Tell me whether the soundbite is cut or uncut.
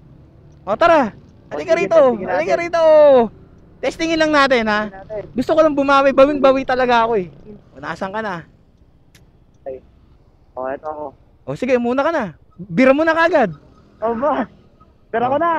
uncut